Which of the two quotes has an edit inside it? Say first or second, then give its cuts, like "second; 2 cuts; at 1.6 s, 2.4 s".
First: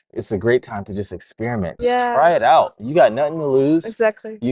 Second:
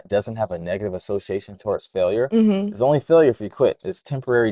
first; 1 cut; at 1.7 s